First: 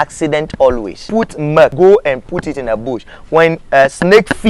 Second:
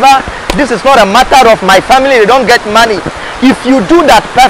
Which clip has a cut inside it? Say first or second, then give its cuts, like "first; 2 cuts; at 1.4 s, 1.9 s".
first; 1 cut; at 1.4 s